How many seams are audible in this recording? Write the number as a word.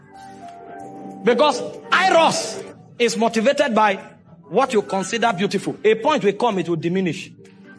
one